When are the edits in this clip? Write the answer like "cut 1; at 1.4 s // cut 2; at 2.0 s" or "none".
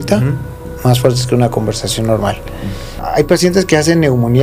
cut 1; at 2.9 s